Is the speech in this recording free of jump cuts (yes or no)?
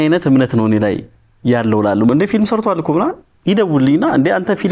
no